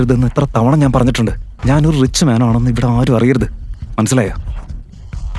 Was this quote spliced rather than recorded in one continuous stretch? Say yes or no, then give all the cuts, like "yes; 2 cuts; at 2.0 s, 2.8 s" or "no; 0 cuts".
yes; 1 cut; at 1.5 s